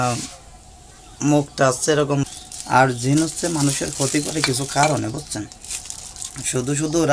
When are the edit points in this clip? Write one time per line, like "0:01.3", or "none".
0:02.2